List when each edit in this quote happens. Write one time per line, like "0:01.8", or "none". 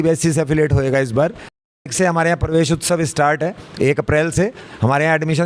0:01.9